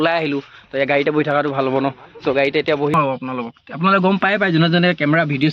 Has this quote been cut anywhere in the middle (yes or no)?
yes